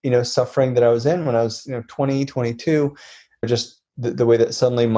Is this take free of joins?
no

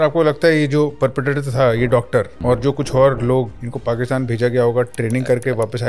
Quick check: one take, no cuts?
no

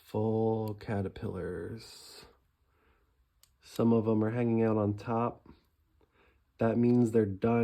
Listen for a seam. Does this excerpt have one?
no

